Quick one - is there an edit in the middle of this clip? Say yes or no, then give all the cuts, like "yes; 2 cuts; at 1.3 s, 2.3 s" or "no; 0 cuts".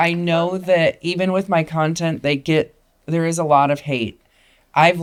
no; 0 cuts